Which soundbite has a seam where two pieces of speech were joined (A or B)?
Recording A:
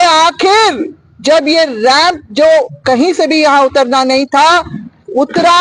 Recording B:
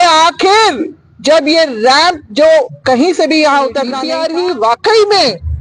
B